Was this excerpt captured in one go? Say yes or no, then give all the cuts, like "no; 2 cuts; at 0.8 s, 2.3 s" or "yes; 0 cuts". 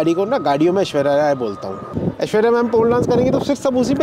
no; 1 cut; at 2.0 s